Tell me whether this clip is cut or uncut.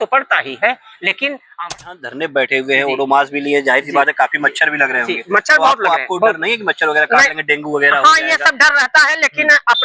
cut